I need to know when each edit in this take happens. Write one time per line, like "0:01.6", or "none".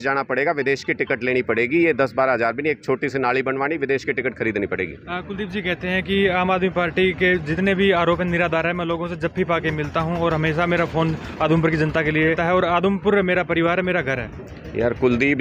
none

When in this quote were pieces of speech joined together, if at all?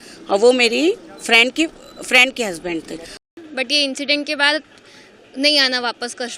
0:03.3

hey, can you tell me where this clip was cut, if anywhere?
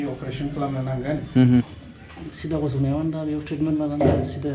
0:01.7

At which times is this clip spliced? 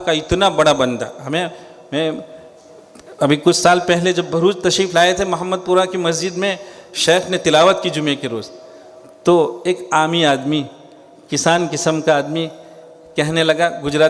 none

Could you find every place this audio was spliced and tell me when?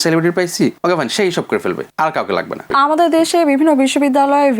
0:00.8
0:01.9
0:02.7

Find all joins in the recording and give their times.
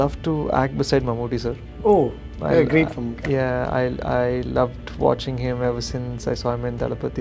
none

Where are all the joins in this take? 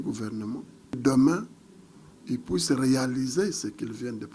0:01.0

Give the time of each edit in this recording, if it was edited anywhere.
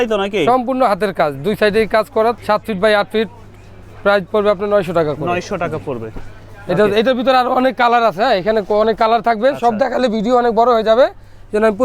none

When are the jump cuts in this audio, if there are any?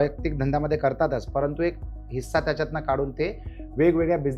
none

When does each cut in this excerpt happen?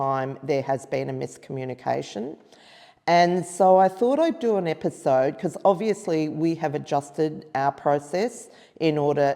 none

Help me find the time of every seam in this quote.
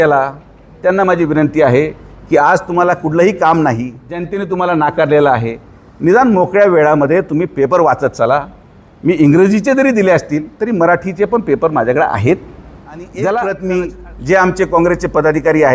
0:04.4
0:13.1

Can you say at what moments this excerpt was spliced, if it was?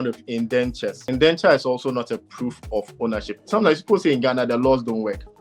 0:01.0
0:03.3

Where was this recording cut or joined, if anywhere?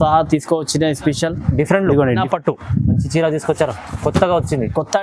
0:02.2

